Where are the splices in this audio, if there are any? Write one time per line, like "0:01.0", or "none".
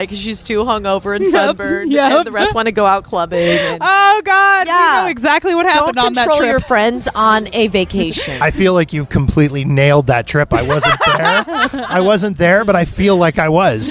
none